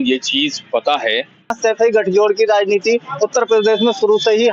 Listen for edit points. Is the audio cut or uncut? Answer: cut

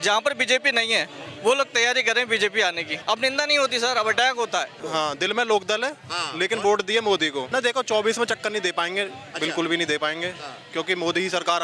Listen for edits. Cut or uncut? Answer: cut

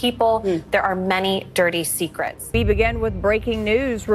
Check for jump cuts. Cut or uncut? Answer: cut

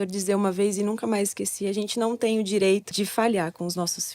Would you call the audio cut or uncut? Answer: cut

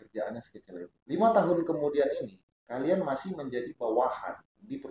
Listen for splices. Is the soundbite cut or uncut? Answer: uncut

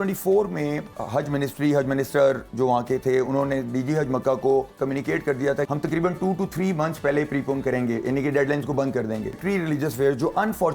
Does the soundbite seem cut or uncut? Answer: cut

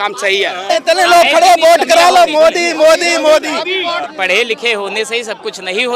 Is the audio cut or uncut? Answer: cut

